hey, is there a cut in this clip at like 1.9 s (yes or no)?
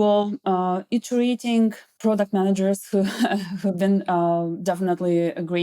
yes